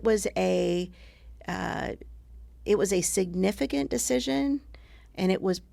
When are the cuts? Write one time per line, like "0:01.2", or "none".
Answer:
none